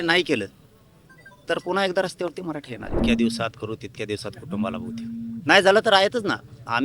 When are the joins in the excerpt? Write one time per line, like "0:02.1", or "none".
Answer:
0:03.0